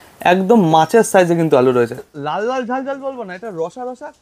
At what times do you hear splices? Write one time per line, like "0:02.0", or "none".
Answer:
0:02.0